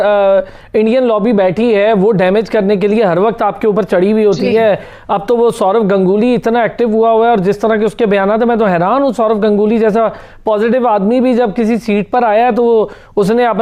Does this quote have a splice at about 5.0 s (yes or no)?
no